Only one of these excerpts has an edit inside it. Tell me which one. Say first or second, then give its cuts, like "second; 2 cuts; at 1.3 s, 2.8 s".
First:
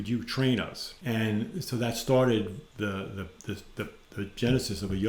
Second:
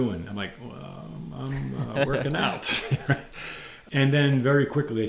second; 1 cut; at 3.8 s